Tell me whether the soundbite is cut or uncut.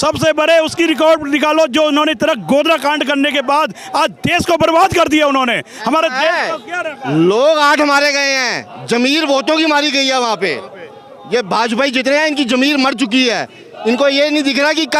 uncut